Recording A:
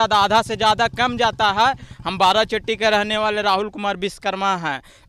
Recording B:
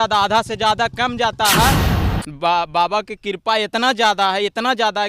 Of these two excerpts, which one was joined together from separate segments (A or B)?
B